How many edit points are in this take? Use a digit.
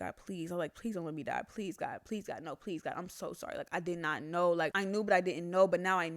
0